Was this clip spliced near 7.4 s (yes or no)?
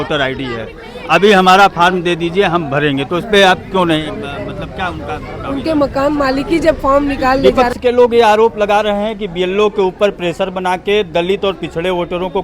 yes